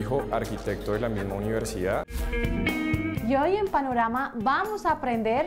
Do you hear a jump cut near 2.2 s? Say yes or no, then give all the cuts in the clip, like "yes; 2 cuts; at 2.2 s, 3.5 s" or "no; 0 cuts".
yes; 1 cut; at 2.2 s